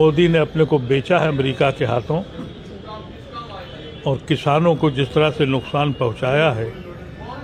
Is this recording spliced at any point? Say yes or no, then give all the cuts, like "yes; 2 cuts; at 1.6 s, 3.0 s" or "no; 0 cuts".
no; 0 cuts